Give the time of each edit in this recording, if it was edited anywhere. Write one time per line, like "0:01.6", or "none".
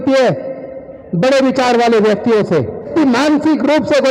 0:02.9